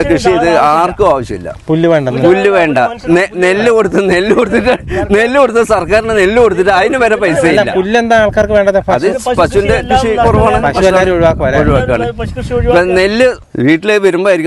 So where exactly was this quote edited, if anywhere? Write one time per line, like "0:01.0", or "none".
0:13.5